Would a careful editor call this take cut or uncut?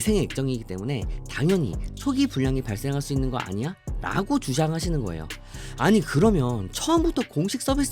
uncut